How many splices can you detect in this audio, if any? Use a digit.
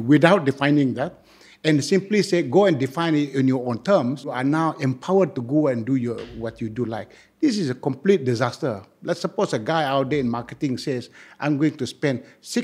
1